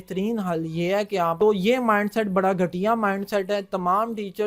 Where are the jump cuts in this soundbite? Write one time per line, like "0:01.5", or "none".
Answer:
0:01.3